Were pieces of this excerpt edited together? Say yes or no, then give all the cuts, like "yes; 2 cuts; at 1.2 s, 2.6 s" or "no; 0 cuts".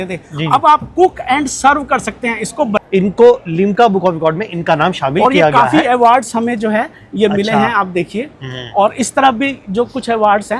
yes; 1 cut; at 2.8 s